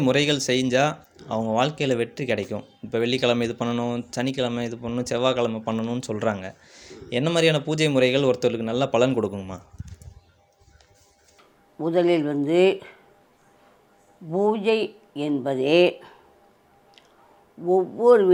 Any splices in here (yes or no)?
no